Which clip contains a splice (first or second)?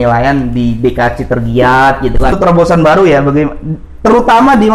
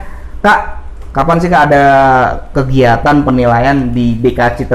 first